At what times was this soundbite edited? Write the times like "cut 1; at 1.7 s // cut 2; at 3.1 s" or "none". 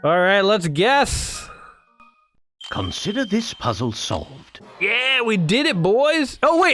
none